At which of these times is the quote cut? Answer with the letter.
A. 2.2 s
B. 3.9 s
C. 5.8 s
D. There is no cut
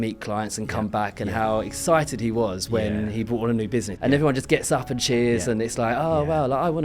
B